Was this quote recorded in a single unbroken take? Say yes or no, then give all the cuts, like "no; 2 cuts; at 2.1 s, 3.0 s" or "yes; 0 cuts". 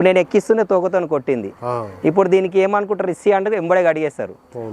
yes; 0 cuts